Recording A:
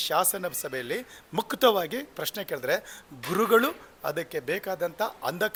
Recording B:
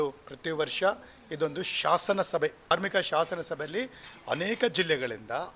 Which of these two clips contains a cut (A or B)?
B